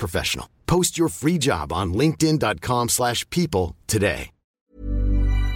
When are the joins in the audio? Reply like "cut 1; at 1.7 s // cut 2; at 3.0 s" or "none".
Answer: cut 1; at 4.6 s